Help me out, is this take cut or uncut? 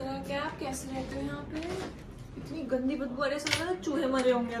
uncut